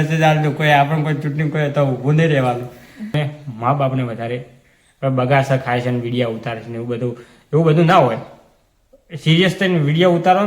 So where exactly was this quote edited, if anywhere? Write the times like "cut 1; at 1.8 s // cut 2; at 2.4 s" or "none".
cut 1; at 3.1 s